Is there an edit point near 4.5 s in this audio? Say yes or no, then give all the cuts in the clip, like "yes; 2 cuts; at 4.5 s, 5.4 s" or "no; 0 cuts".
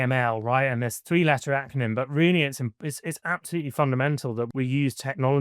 yes; 1 cut; at 4.5 s